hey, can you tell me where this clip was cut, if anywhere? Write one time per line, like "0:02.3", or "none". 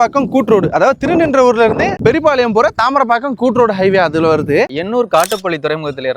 0:04.7